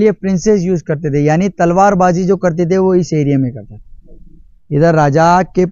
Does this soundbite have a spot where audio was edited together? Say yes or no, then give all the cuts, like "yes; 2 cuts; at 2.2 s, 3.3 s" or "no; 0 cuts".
no; 0 cuts